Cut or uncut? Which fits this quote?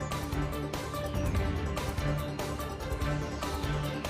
uncut